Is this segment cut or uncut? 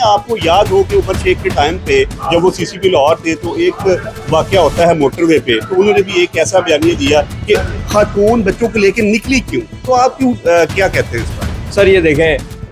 uncut